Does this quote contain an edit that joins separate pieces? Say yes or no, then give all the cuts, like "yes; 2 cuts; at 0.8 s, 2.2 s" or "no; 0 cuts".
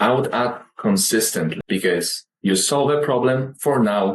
yes; 1 cut; at 1.6 s